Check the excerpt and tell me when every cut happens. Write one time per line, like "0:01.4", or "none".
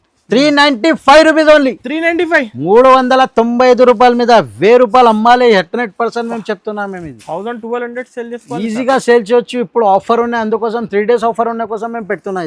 none

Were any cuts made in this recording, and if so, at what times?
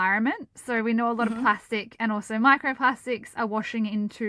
none

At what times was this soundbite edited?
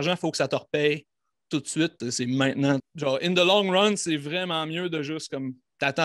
0:02.0
0:02.9

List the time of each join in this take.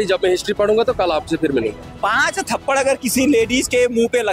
0:01.9

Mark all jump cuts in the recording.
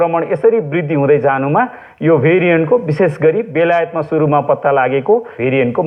none

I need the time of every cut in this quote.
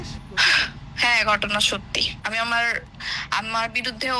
none

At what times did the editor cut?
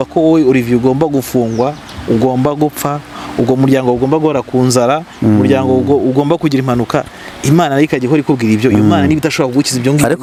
none

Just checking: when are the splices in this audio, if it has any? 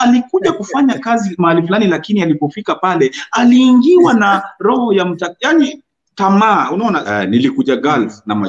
0:07.0

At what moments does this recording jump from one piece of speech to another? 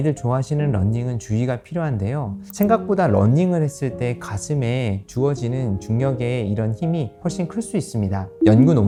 none

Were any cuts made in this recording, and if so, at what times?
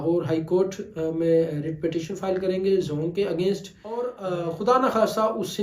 0:04.2

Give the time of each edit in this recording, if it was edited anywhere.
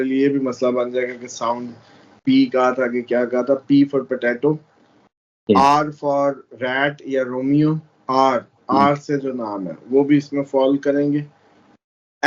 none

